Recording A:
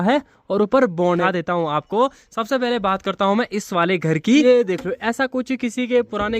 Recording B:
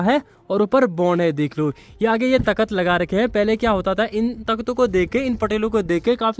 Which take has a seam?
A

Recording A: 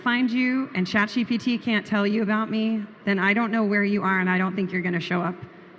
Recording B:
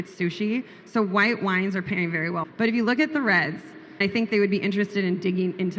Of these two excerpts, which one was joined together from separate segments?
B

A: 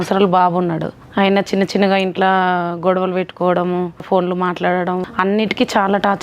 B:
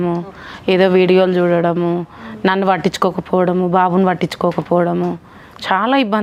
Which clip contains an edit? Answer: A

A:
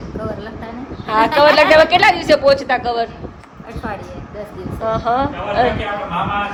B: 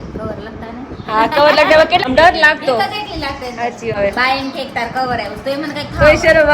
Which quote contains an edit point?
B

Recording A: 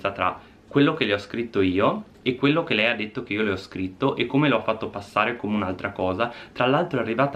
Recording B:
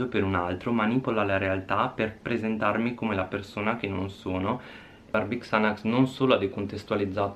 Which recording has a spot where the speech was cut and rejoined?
B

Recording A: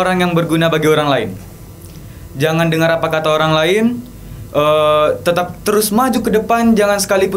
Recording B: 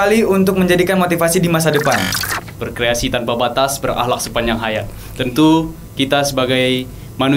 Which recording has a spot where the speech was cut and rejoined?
B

